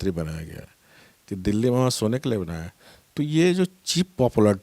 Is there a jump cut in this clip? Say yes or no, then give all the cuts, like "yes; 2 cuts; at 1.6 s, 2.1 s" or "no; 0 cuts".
no; 0 cuts